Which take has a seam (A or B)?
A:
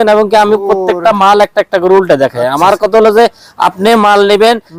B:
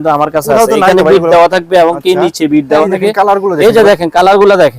B